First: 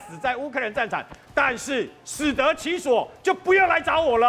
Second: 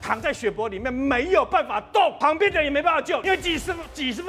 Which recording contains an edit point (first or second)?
second